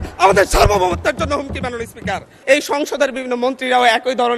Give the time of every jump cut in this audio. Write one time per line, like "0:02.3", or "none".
0:02.3

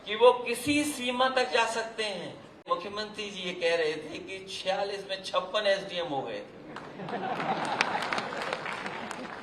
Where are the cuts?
0:02.7

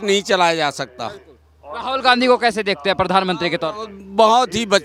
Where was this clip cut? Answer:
none

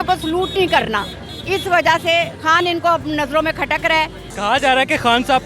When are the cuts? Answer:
none

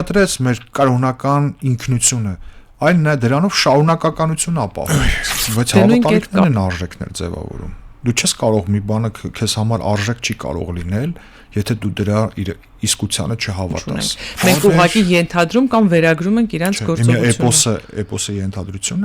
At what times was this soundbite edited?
0:06.3
0:13.8

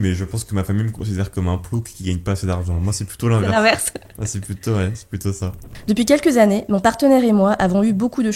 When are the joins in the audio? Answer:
none

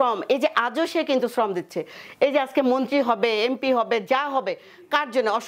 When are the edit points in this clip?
none

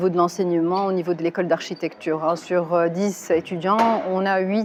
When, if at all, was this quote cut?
none

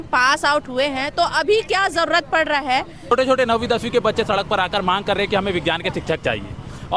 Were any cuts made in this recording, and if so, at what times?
0:03.1

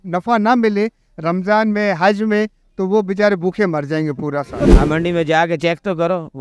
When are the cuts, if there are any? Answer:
0:04.7

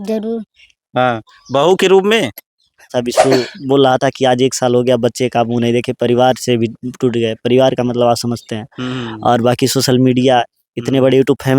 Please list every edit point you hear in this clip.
0:02.9

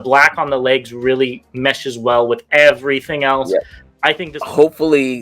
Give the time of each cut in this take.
0:04.2

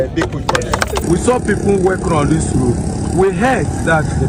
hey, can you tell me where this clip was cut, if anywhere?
0:01.0

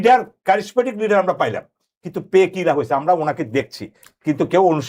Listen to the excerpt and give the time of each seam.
none

